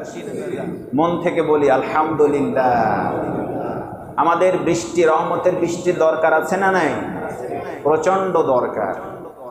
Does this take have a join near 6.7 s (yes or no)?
no